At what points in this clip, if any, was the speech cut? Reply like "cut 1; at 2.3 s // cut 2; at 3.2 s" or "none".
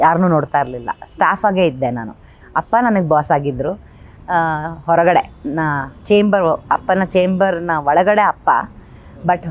none